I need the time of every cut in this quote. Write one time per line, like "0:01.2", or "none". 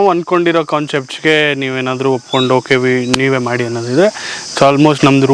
none